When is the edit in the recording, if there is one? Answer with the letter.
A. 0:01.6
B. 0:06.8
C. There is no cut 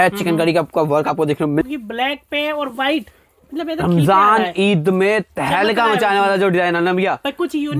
A